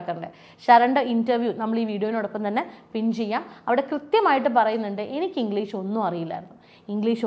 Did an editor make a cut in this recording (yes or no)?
no